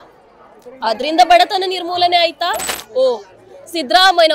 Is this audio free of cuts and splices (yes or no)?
no